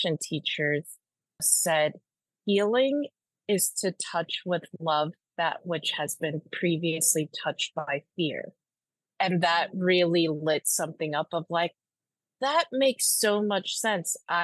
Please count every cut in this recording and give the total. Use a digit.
1